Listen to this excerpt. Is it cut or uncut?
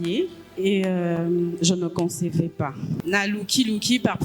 uncut